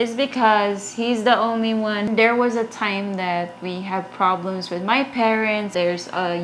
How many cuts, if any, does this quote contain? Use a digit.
2